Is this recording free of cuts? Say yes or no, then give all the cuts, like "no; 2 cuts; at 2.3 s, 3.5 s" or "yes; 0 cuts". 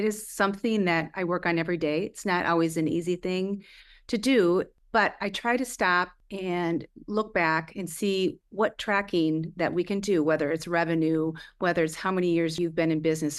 no; 4 cuts; at 4.8 s, 6.2 s, 8.4 s, 12.5 s